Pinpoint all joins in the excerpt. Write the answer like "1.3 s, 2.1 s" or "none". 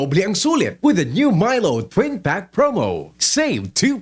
none